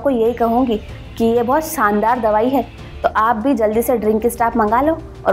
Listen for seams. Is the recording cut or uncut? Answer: uncut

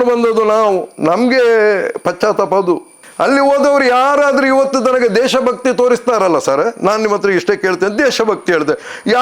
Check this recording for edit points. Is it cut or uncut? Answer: cut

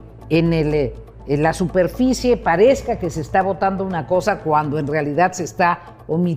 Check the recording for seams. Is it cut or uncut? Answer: uncut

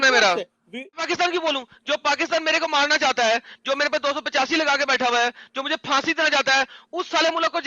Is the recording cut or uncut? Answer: cut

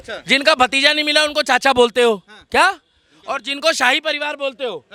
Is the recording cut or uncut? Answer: uncut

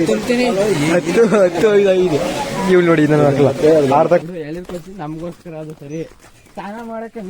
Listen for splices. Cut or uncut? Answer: cut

